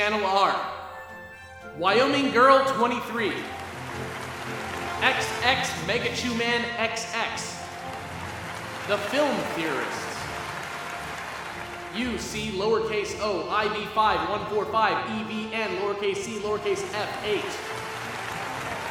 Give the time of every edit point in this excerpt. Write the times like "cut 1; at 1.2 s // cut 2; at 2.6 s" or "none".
none